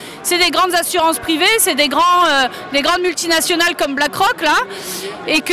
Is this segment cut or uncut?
uncut